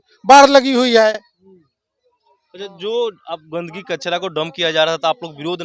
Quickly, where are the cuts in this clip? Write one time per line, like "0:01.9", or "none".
none

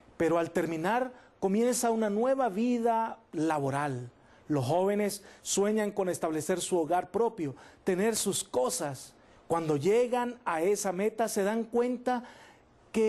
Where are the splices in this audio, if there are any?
0:10.8

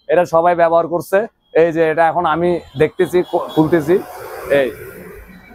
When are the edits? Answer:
none

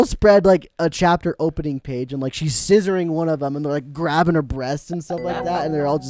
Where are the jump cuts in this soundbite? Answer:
none

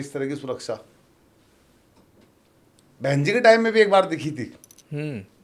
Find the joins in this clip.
none

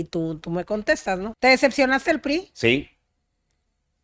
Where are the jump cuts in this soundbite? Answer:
0:01.3

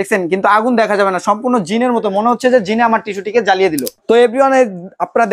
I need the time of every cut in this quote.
0:03.9

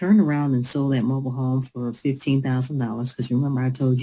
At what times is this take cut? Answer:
0:03.0

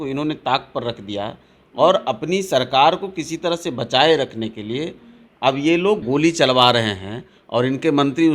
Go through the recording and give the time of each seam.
0:06.0

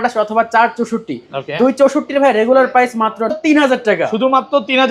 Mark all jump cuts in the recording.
0:03.3

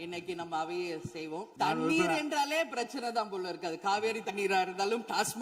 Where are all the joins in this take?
0:01.5

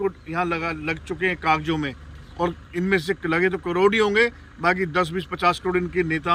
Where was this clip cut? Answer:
none

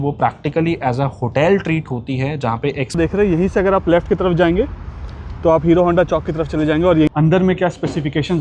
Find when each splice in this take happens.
0:03.0
0:07.1

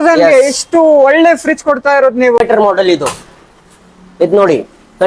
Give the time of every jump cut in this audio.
0:02.4

